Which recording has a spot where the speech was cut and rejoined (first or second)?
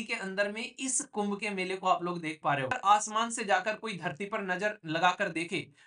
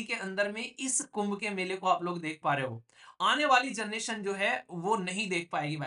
first